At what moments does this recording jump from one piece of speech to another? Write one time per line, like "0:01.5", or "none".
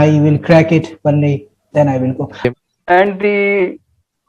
0:02.3